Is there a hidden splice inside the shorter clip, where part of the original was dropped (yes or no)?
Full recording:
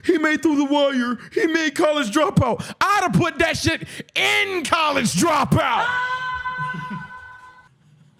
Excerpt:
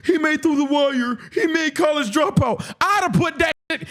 no